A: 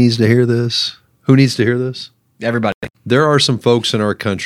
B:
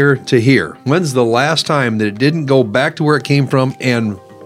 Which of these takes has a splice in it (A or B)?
A